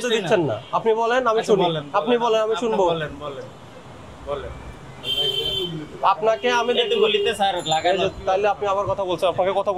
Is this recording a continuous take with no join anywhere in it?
yes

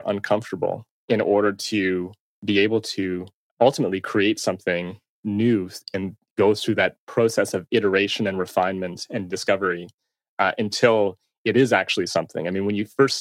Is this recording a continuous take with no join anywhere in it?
no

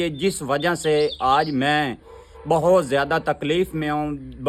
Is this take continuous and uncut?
yes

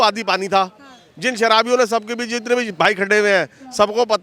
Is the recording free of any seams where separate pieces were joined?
yes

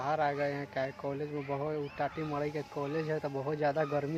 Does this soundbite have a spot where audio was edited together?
no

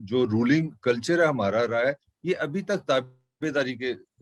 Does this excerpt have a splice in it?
no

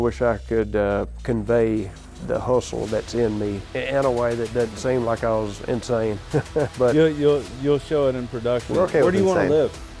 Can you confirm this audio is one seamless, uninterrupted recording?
no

